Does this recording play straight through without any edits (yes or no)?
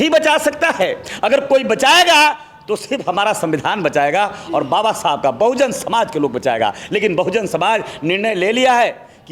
yes